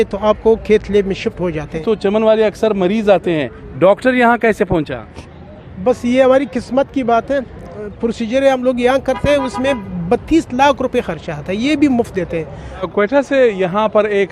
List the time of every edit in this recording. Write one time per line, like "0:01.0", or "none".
0:01.8
0:07.8
0:12.9